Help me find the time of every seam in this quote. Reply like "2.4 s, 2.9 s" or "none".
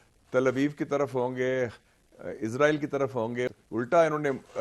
3.6 s